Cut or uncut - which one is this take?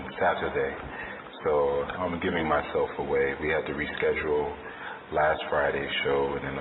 uncut